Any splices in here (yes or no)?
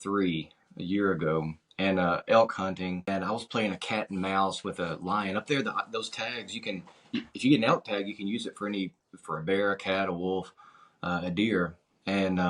yes